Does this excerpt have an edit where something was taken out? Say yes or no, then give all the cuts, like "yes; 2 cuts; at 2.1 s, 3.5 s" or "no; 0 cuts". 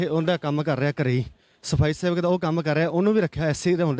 no; 0 cuts